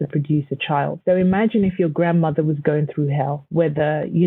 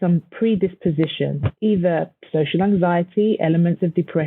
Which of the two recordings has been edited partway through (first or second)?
first